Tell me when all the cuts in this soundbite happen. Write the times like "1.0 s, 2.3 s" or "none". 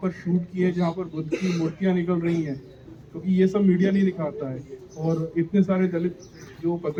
none